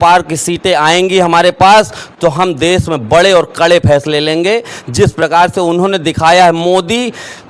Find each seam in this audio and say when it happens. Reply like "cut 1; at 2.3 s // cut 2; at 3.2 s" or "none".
none